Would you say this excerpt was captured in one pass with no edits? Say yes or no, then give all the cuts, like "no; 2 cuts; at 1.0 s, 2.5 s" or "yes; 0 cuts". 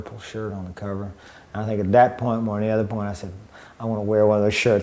no; 1 cut; at 3.6 s